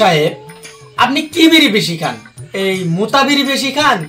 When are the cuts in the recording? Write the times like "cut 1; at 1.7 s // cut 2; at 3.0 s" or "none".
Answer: none